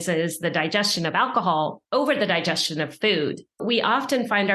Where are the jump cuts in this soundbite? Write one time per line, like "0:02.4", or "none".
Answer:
0:01.8
0:03.6